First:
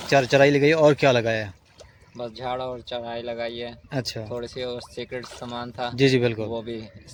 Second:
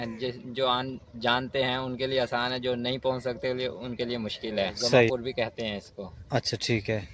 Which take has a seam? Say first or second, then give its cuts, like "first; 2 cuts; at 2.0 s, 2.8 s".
second; 1 cut; at 5.1 s